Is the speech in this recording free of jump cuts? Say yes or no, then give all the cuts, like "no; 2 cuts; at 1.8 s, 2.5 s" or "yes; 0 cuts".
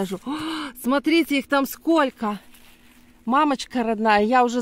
yes; 0 cuts